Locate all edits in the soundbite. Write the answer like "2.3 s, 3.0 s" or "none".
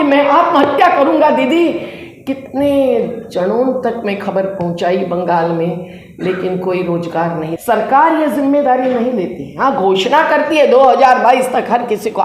7.5 s